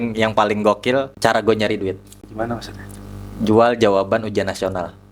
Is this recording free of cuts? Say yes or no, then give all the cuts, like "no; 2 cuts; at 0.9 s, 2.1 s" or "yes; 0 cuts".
no; 2 cuts; at 1.1 s, 2.2 s